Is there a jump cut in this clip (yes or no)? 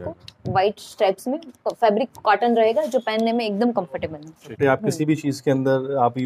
yes